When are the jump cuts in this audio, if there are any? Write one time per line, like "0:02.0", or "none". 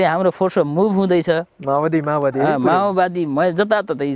none